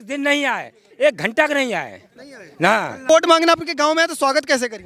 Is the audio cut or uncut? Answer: cut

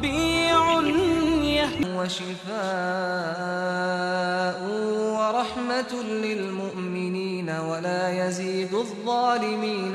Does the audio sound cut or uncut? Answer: cut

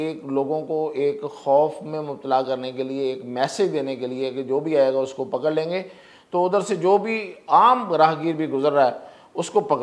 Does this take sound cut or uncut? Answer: uncut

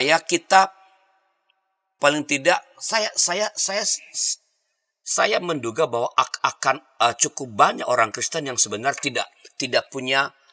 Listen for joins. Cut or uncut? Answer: uncut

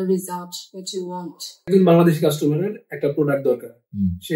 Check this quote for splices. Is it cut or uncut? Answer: cut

